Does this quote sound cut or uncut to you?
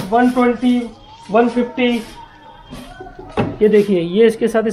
uncut